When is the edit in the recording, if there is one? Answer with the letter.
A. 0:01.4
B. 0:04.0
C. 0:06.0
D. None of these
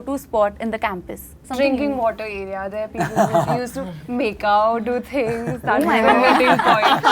A